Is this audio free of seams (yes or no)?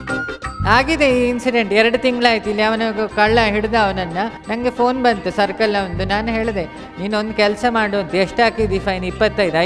no